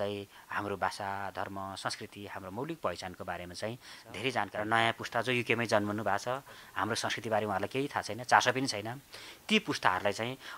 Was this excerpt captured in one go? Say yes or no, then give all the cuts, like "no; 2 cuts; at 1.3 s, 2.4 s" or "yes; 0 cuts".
no; 1 cut; at 4.5 s